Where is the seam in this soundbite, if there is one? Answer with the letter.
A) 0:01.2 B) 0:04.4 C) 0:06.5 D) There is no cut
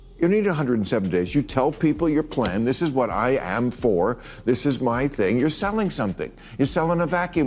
D